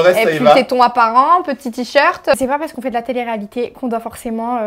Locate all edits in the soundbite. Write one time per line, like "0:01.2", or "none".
0:02.3